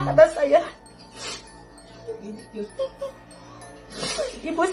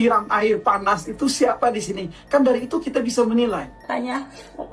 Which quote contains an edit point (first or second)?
second